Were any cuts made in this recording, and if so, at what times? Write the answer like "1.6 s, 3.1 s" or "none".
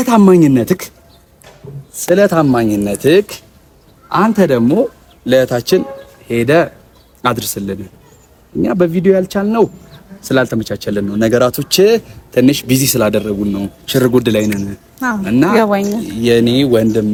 none